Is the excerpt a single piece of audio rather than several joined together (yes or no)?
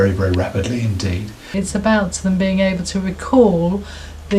no